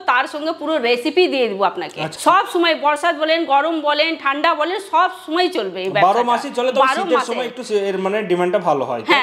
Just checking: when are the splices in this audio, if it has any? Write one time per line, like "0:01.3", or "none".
0:02.1